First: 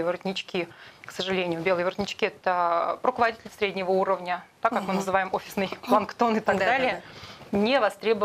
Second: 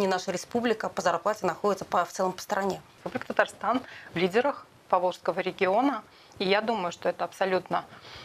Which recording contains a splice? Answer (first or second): second